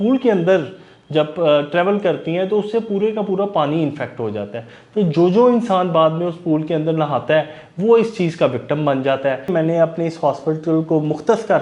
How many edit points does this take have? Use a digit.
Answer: 1